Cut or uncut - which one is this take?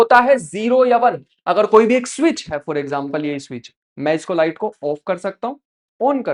uncut